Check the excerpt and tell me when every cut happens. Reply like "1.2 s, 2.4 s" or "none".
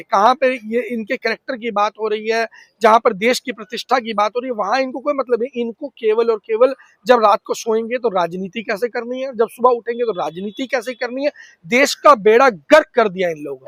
none